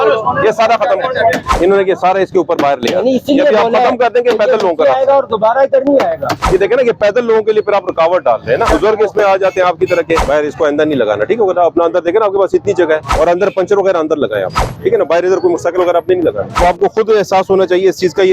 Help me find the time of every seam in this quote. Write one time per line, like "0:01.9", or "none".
0:01.5
0:06.3
0:08.7
0:10.2
0:13.1
0:16.6